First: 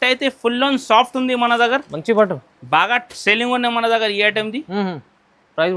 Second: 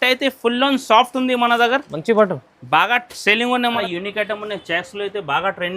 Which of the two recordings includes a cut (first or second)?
second